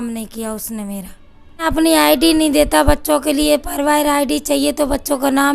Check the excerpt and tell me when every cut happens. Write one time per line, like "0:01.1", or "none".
0:01.7